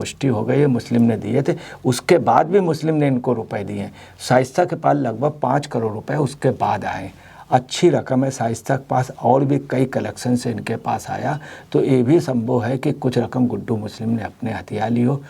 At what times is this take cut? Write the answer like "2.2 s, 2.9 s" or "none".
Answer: none